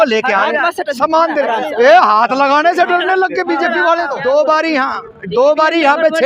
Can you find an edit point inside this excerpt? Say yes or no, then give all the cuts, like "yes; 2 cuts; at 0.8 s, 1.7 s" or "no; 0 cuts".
yes; 1 cut; at 4.2 s